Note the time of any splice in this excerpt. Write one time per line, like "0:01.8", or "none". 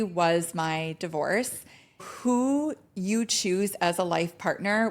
0:02.0